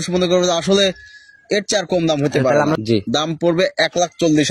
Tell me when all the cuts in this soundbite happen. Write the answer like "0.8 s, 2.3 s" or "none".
2.8 s